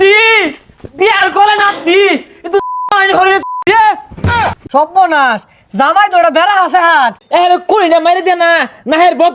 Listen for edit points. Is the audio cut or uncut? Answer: cut